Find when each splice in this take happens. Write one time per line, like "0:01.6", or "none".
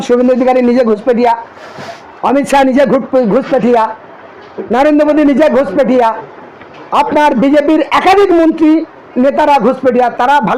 none